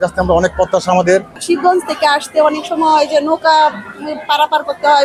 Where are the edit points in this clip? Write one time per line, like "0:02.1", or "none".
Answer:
none